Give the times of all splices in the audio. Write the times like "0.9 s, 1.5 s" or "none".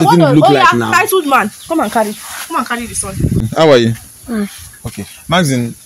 3.5 s